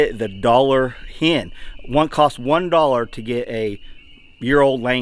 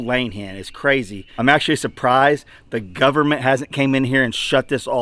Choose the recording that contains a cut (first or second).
second